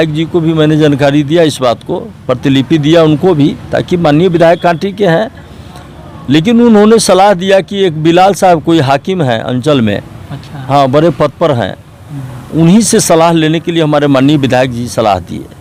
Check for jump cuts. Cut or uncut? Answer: uncut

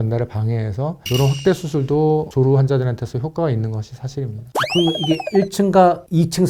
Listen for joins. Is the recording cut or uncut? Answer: uncut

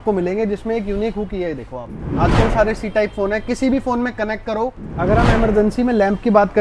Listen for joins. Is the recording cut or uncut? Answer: cut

